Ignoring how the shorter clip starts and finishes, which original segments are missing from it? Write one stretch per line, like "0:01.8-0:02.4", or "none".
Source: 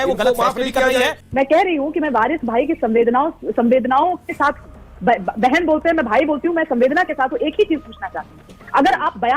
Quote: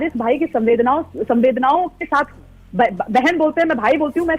none